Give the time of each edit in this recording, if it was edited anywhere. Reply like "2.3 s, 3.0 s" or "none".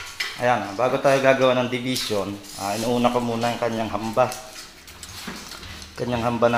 none

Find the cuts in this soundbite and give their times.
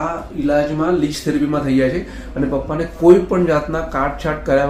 none

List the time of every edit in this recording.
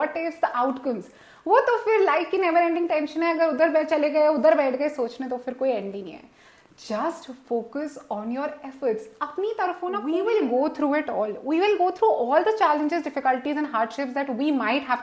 10.0 s

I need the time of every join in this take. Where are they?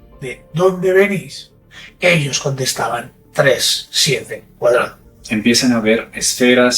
5.0 s

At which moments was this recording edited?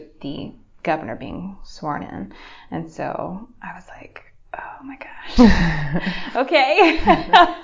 none

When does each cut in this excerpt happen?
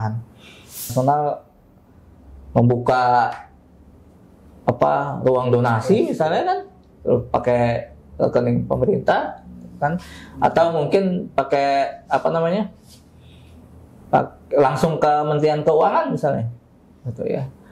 0.9 s

